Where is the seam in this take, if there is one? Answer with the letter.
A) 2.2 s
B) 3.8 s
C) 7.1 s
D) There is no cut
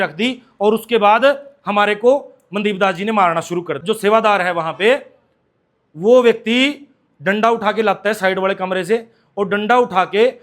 B